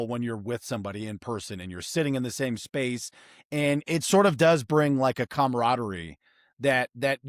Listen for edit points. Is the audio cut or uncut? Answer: uncut